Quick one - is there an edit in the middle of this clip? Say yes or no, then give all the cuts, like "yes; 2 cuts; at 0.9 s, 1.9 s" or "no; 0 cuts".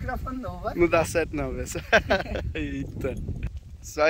no; 0 cuts